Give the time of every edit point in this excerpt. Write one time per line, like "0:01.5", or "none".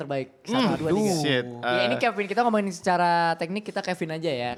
none